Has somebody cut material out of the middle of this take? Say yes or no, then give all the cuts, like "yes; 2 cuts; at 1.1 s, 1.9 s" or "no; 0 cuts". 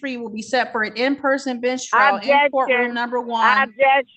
no; 0 cuts